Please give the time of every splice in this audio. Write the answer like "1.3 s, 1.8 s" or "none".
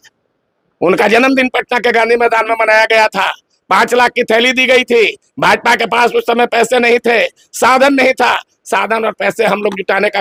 none